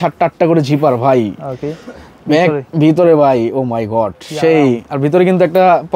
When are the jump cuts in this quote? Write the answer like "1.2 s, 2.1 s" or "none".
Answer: none